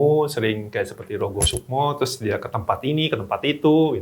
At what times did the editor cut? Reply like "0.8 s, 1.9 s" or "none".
none